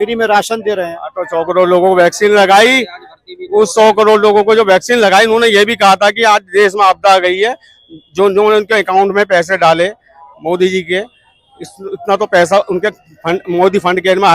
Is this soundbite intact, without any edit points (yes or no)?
yes